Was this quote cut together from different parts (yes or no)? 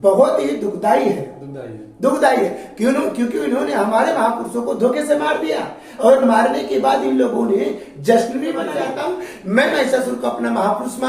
yes